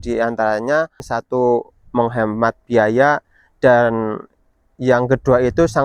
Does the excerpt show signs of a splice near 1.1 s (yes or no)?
yes